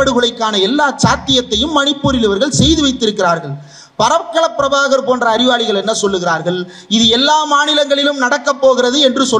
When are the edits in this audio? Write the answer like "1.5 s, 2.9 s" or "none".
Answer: none